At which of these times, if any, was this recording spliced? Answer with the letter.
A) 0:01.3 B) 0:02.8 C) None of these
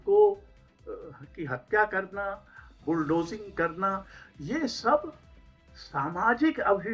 B